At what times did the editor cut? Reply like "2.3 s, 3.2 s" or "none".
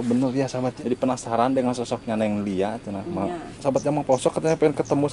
0.8 s, 3.5 s